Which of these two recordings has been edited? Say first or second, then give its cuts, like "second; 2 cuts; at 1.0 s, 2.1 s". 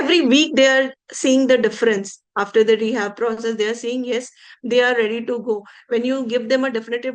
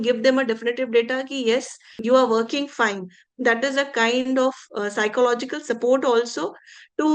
second; 1 cut; at 1.9 s